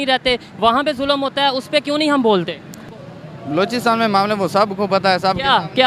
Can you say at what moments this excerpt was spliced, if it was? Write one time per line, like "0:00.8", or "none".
0:03.0